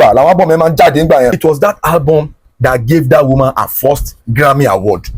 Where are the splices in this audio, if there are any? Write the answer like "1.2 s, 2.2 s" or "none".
1.4 s